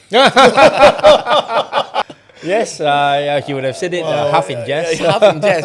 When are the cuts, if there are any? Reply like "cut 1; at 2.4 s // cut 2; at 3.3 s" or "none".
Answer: cut 1; at 2.1 s